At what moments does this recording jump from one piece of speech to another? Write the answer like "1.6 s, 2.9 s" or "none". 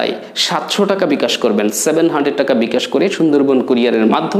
none